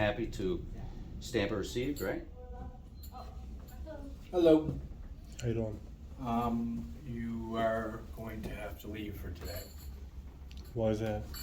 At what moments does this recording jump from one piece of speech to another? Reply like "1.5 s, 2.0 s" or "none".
2.4 s